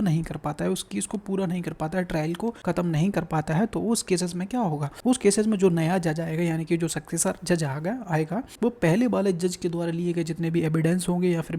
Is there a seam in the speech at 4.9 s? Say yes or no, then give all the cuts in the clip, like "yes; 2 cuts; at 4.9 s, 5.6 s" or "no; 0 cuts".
yes; 3 cuts; at 2.6 s, 4.9 s, 8.5 s